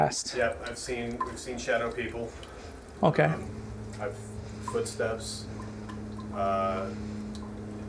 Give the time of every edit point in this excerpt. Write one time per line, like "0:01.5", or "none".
none